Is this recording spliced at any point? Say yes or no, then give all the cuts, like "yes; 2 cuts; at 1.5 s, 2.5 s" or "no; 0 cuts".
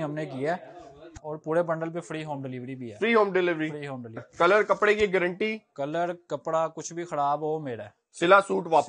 yes; 2 cuts; at 1.2 s, 4.2 s